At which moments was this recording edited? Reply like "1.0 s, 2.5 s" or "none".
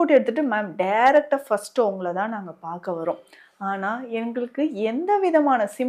none